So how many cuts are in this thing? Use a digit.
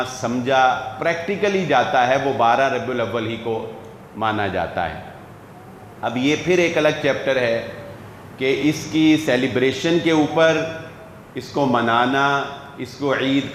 0